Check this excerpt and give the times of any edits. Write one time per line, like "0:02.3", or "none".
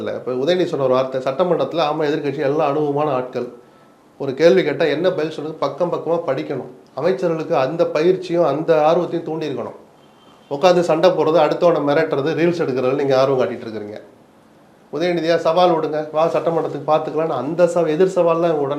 none